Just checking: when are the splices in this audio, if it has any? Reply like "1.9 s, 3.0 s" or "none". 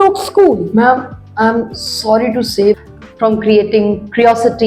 2.8 s